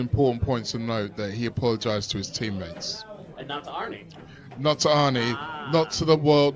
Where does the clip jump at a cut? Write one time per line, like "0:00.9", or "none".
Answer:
none